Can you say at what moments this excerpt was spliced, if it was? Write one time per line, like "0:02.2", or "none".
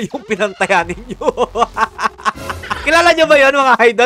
0:02.7